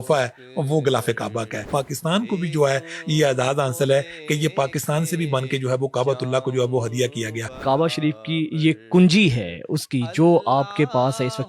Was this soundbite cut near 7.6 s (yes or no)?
yes